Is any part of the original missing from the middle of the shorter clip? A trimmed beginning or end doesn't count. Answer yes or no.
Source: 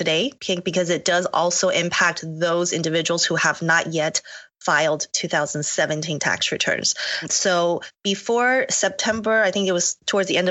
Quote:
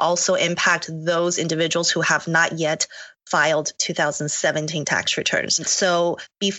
yes